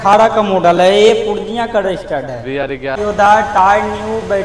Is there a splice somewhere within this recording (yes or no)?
yes